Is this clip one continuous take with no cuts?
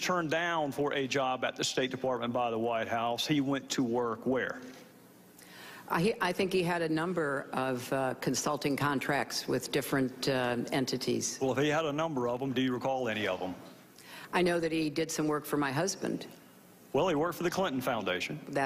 yes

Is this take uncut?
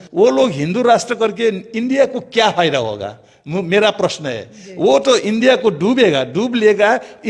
yes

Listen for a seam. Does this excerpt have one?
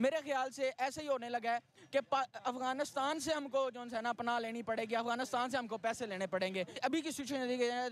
yes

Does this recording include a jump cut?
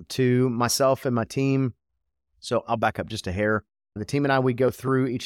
no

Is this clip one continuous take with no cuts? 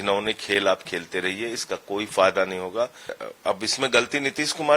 no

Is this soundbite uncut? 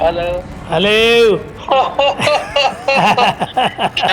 no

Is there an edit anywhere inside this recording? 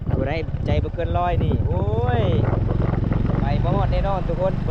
no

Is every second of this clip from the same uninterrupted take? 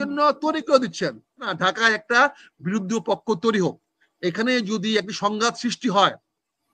no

